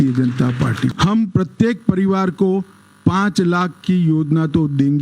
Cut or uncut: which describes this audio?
cut